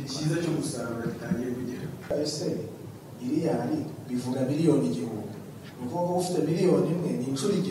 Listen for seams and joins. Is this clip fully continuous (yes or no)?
no